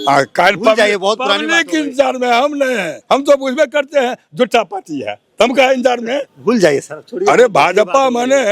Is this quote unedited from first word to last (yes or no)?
no